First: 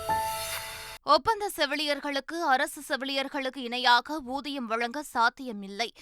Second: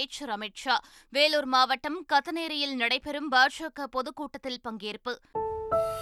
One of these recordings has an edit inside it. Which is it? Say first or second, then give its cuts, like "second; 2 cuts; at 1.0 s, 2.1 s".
first; 1 cut; at 0.9 s